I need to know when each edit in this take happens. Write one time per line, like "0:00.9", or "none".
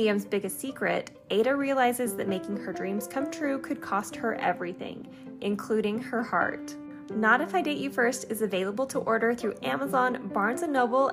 none